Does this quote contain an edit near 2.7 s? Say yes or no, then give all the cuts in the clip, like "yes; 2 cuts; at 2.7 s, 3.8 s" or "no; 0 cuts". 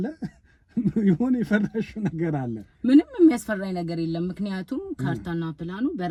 no; 0 cuts